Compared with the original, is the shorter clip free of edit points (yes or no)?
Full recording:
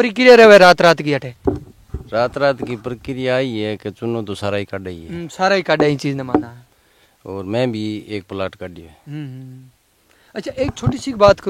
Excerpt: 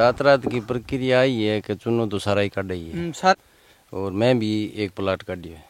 no